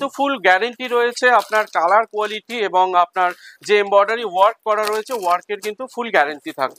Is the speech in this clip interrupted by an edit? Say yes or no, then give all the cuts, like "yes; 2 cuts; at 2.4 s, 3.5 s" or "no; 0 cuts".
no; 0 cuts